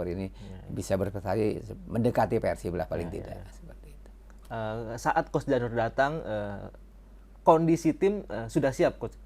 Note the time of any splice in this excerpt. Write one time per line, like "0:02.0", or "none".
none